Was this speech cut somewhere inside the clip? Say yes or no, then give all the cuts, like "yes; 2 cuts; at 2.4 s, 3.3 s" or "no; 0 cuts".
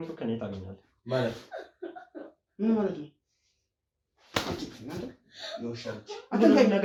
no; 0 cuts